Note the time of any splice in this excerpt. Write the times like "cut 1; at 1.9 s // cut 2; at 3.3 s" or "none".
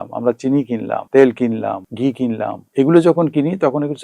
cut 1; at 1.0 s // cut 2; at 2.2 s